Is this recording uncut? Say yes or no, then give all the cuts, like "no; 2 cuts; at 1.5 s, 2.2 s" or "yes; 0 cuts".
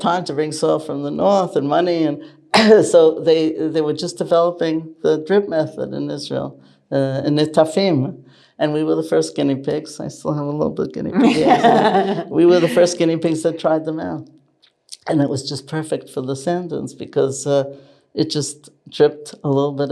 yes; 0 cuts